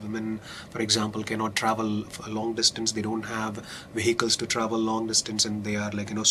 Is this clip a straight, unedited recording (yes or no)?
yes